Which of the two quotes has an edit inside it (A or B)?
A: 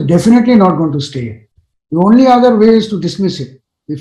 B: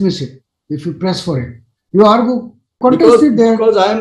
B